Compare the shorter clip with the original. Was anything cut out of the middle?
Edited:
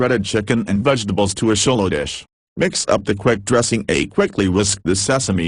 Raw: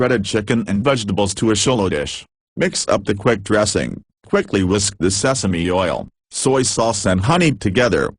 yes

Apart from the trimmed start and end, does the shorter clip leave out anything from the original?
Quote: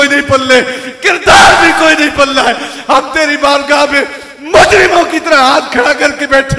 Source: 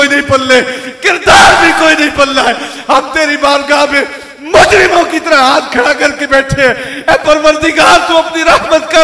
no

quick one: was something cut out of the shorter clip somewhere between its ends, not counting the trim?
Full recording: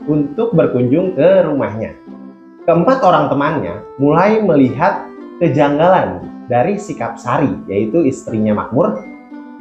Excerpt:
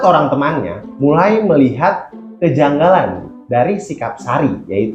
no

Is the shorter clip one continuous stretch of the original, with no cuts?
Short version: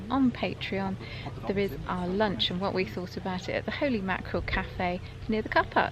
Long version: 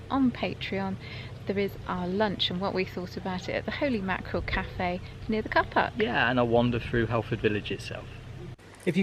yes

